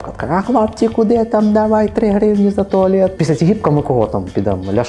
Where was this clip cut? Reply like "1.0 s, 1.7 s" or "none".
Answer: 3.2 s